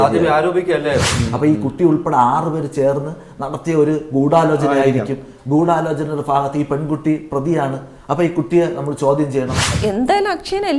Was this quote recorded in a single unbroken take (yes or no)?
no